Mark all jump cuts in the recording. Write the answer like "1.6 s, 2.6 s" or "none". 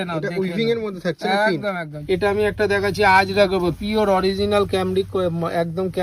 1.9 s